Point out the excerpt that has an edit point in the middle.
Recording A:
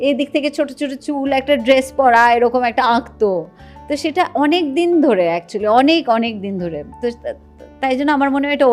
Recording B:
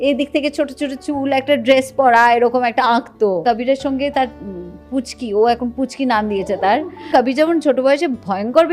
B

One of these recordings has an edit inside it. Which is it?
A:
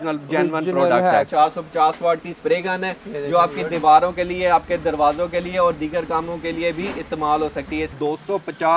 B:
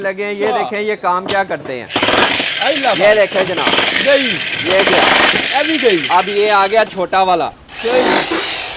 A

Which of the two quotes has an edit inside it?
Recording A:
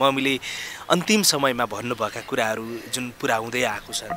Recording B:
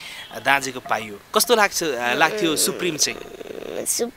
B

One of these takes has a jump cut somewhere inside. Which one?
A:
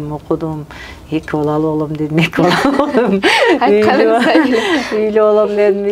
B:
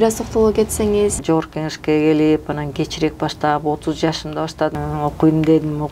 B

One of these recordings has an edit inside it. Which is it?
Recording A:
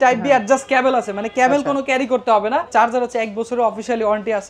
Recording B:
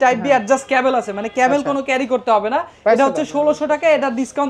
A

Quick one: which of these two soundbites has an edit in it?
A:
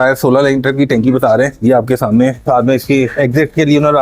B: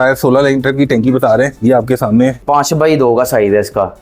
B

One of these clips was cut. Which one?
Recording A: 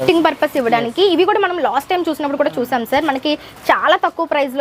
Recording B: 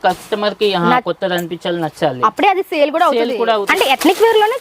B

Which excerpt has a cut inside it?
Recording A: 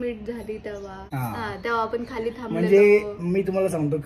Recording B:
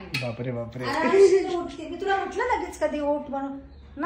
A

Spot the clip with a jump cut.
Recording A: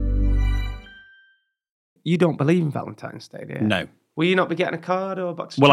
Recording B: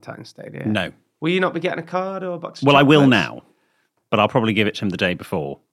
A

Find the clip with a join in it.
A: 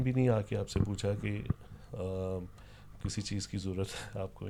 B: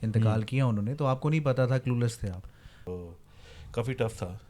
B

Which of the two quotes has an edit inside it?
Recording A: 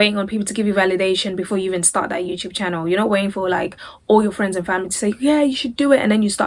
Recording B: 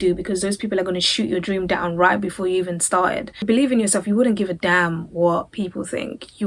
B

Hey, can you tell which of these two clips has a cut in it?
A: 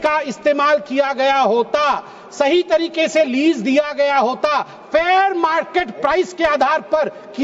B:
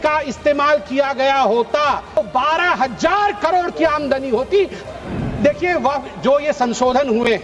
B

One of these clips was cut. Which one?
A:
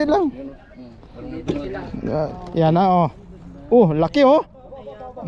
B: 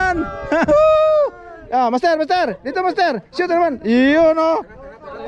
A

